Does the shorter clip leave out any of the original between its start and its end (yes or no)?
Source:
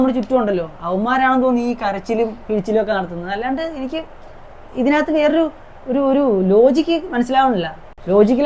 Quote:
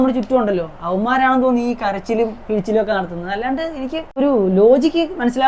yes